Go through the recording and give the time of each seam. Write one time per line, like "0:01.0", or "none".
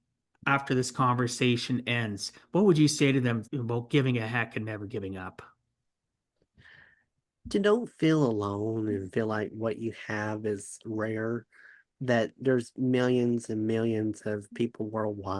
0:03.5

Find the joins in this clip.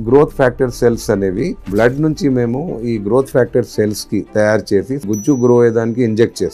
0:01.6
0:05.0

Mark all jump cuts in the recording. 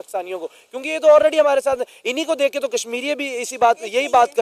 none

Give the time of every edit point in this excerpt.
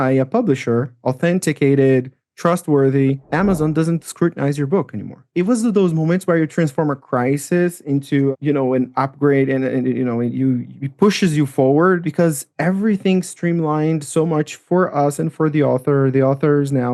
0:05.3

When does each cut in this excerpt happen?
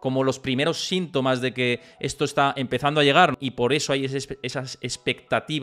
0:03.3

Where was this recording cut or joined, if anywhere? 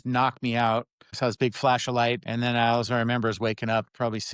0:01.0
0:02.2

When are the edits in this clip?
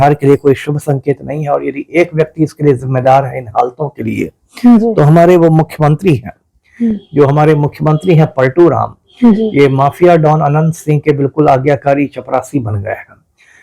none

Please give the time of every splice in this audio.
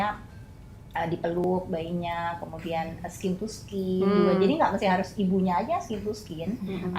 0:01.4

